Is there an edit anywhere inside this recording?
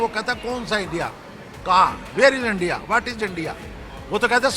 no; 0 cuts

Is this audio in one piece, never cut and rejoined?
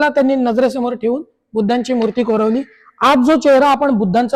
yes; 0 cuts

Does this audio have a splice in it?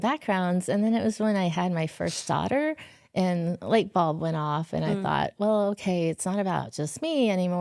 no; 0 cuts

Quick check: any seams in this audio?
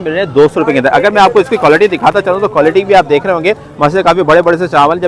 no; 0 cuts

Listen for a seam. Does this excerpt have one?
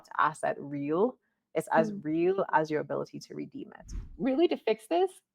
yes; 1 cut; at 4.1 s

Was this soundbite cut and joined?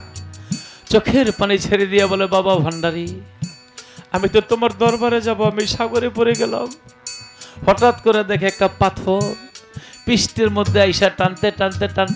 no; 0 cuts

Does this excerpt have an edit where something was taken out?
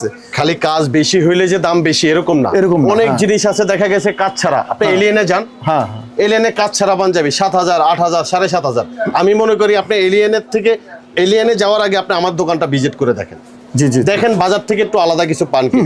no; 0 cuts

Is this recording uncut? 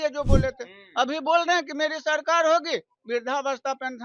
yes; 0 cuts

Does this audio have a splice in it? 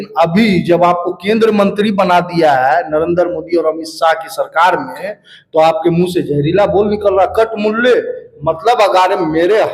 no; 0 cuts

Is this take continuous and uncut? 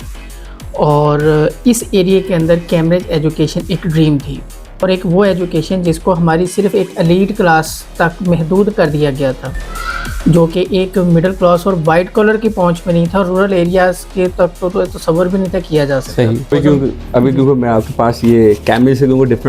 no; 2 cuts; at 4.8 s, 16.5 s

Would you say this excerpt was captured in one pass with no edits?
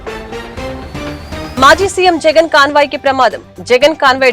no; 1 cut; at 1.5 s

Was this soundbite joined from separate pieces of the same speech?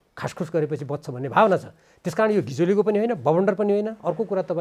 no; 0 cuts

